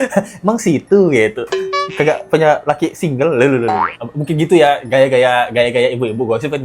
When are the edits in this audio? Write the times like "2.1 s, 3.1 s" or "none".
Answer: none